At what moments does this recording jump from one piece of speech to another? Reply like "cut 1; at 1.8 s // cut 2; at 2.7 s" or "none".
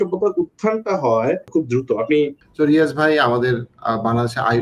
cut 1; at 1.4 s // cut 2; at 2.4 s